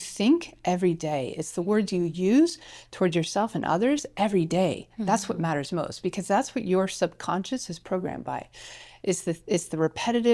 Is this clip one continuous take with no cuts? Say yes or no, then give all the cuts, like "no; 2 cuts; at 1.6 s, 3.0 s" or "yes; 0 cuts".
yes; 0 cuts